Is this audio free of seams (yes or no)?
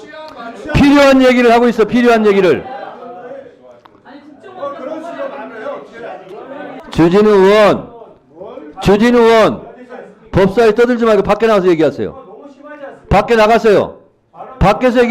no